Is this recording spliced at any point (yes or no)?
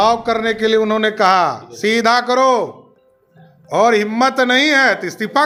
no